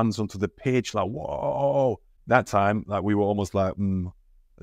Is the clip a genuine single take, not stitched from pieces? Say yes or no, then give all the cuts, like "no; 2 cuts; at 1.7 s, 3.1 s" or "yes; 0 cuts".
no; 1 cut; at 2.1 s